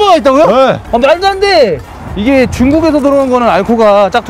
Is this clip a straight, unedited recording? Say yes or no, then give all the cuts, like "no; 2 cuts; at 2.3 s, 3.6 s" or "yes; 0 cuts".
no; 1 cut; at 1.8 s